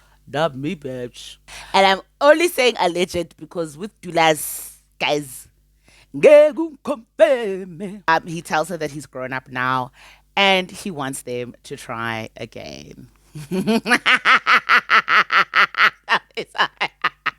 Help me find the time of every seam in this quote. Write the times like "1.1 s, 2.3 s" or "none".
1.5 s, 8.3 s